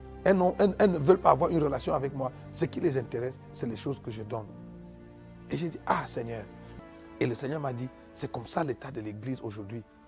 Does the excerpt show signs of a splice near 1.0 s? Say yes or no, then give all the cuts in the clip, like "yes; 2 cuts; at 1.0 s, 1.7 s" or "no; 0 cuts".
no; 1 cut; at 6.6 s